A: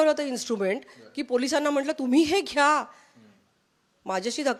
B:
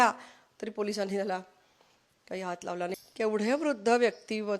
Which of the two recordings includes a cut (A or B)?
B